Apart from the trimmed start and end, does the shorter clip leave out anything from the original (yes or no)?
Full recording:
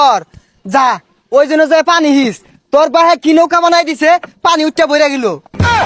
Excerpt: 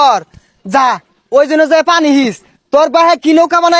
no